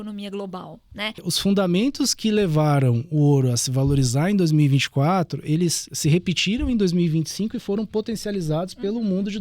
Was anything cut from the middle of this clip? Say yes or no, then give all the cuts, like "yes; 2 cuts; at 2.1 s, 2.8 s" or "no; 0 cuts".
yes; 1 cut; at 1.3 s